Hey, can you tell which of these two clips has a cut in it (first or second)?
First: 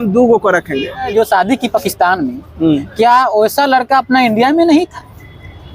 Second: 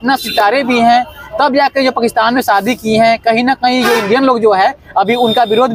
first